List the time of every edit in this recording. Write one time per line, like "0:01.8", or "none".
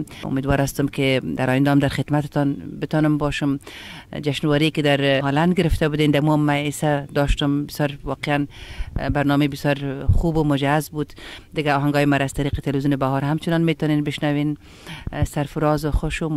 none